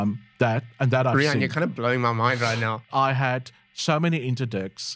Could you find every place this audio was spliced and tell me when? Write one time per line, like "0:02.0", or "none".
0:02.8